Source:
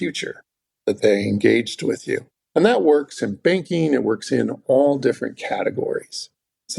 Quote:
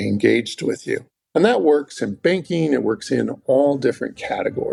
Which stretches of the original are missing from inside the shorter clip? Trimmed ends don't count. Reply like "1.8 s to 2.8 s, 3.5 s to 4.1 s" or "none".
none